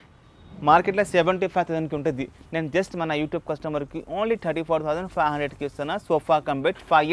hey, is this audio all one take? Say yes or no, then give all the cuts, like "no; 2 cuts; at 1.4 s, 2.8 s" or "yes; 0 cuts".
yes; 0 cuts